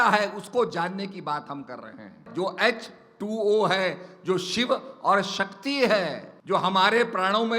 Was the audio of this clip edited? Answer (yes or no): yes